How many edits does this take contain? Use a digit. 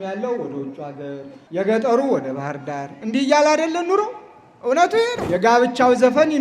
2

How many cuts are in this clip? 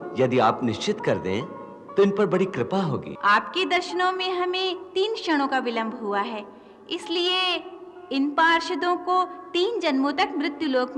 1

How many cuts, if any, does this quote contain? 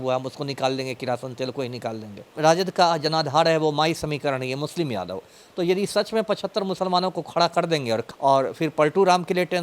2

